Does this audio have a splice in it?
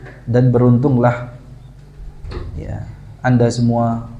no; 0 cuts

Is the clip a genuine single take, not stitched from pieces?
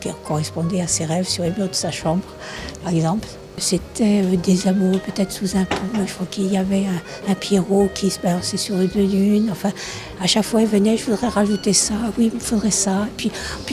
yes; 0 cuts

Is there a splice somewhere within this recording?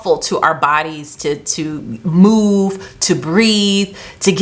no; 0 cuts

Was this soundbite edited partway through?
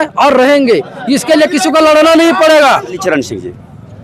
yes; 1 cut; at 3.0 s

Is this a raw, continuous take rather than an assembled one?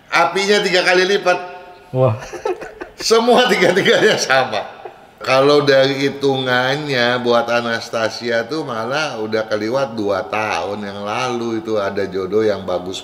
no; 1 cut; at 5.2 s

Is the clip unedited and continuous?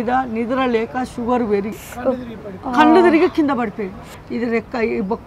no; 2 cuts; at 1.8 s, 4.2 s

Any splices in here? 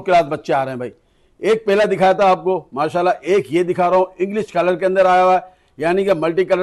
no; 0 cuts

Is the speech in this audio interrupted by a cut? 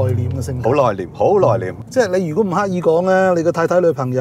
yes; 1 cut; at 1.8 s

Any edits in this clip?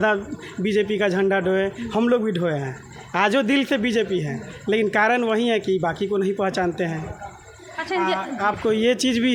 no; 0 cuts

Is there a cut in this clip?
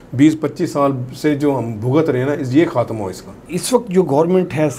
yes; 1 cut; at 3.5 s

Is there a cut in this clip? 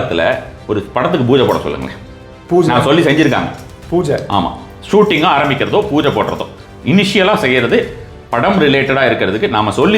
no; 0 cuts

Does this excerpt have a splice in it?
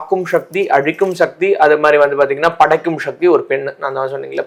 no; 0 cuts

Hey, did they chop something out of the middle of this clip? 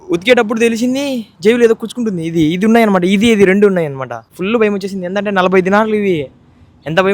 yes; 1 cut; at 4.3 s

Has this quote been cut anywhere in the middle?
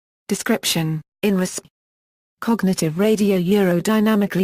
no; 0 cuts

